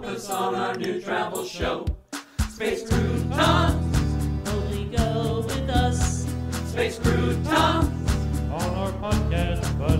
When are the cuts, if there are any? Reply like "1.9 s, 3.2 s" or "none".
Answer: none